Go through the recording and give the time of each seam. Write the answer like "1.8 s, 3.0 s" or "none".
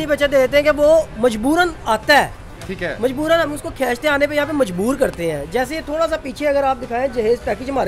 none